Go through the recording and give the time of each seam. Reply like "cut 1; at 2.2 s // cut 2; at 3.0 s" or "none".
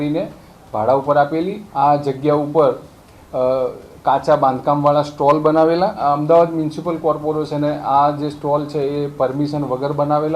cut 1; at 1.6 s // cut 2; at 6.0 s